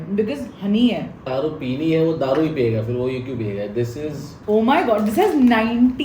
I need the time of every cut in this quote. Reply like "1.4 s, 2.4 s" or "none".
1.1 s, 4.3 s